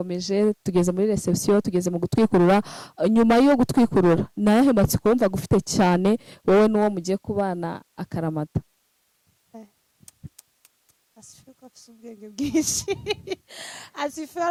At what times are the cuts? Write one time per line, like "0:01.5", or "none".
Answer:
none